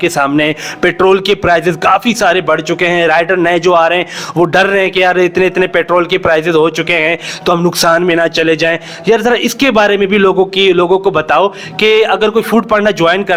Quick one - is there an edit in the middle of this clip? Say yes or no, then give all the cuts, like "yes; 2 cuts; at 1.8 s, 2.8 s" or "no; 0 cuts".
no; 0 cuts